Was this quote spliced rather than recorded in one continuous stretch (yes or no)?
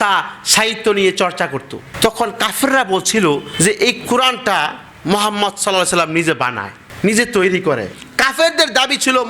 no